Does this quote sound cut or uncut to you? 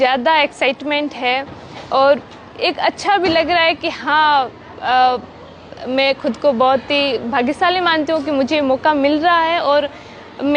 uncut